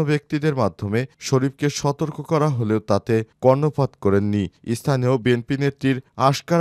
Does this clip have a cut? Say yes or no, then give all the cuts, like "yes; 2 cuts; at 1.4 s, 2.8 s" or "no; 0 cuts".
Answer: no; 0 cuts